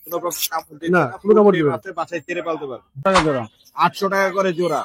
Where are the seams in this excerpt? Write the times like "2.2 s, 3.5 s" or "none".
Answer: 3.0 s